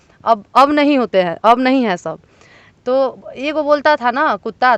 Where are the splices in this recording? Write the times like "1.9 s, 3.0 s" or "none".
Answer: none